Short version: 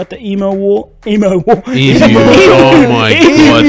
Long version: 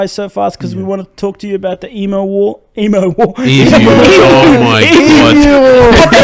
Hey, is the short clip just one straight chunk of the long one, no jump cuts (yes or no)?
yes